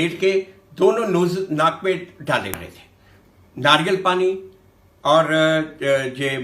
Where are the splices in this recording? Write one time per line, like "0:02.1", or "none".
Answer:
0:02.7